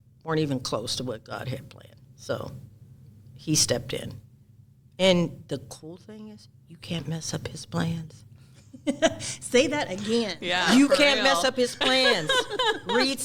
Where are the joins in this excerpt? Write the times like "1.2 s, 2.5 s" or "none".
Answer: none